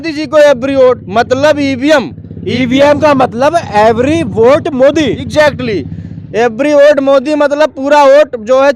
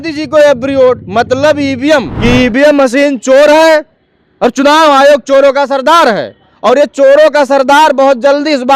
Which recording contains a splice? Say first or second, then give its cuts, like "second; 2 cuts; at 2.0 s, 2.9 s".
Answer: second; 1 cut; at 2.1 s